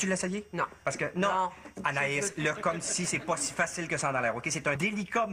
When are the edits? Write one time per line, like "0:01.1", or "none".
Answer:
0:01.6